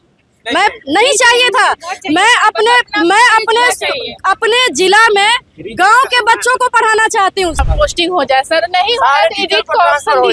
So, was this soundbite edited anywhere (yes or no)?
yes